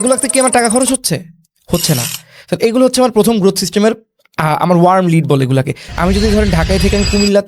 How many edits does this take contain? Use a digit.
1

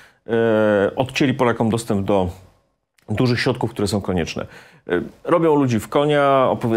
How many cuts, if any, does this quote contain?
0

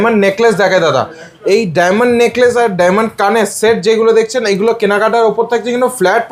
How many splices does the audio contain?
0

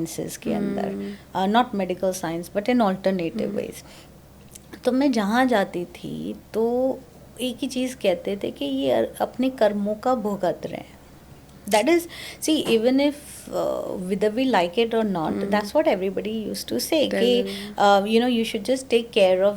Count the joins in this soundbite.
0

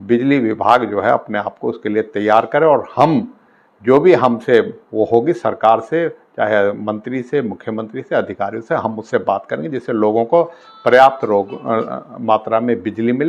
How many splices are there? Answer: 0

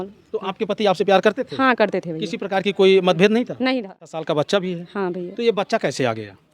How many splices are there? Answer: 1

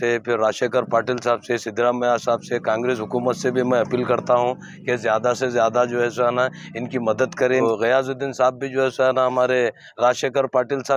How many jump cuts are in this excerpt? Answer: 1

